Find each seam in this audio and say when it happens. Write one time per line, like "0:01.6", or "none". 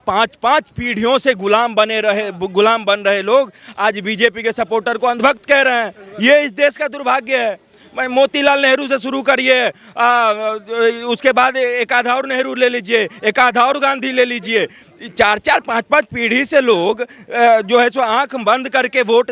none